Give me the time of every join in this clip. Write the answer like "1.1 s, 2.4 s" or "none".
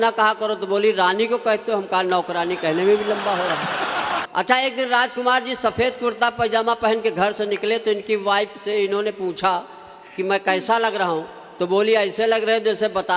4.2 s